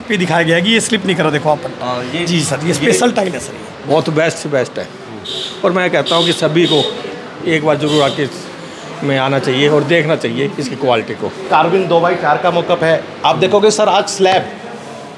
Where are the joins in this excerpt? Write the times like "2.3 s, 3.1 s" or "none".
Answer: 3.7 s, 11.5 s